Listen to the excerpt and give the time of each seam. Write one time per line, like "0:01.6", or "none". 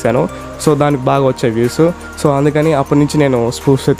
none